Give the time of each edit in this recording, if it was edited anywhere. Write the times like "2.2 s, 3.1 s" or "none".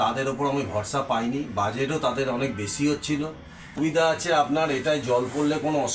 3.8 s